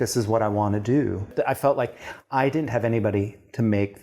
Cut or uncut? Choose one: cut